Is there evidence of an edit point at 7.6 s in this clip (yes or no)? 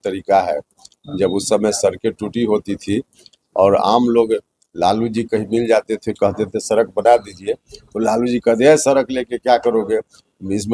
no